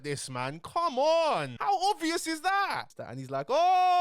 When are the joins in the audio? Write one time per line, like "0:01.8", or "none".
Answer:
0:01.5
0:02.9